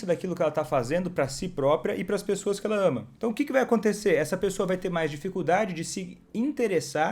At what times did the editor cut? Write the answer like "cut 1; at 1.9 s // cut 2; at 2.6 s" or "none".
cut 1; at 3.1 s